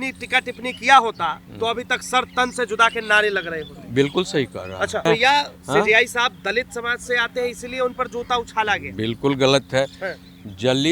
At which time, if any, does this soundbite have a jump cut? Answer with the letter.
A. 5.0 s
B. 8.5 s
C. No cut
A